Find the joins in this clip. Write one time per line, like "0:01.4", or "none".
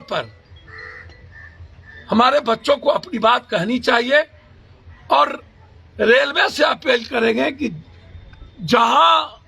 none

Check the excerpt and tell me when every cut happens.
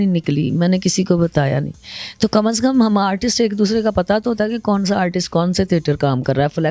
none

